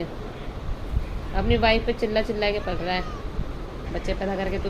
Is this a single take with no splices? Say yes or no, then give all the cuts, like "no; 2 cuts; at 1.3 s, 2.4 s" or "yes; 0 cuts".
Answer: no; 1 cut; at 3.7 s